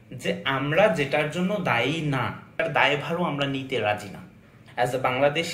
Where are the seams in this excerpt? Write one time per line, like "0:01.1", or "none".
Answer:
0:02.6
0:04.6